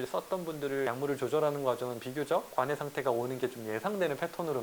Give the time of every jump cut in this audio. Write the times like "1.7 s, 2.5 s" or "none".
0.9 s, 2.5 s